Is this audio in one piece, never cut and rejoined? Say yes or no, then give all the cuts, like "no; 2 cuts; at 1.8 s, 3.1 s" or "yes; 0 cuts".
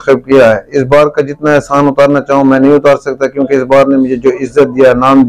yes; 0 cuts